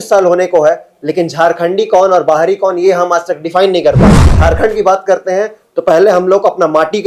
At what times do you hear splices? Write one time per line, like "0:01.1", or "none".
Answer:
0:04.4